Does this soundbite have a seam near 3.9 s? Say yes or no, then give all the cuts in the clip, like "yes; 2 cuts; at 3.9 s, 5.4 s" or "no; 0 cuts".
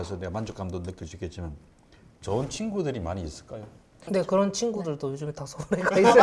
yes; 1 cut; at 3.9 s